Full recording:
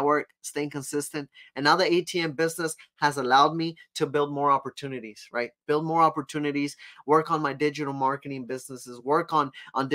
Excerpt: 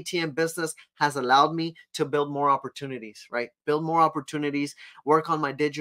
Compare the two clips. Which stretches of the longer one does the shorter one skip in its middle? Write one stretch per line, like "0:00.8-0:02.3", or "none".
none